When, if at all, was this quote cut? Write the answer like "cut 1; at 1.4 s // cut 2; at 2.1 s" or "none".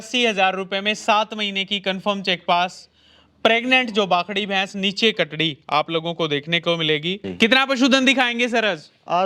cut 1; at 7.3 s